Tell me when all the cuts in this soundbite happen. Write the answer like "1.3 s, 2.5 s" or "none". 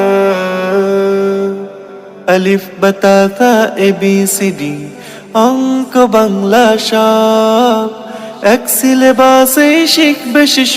1.6 s